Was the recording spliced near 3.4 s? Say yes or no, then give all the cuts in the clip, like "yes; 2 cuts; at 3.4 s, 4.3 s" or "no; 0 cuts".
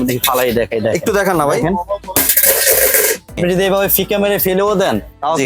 yes; 1 cut; at 3.4 s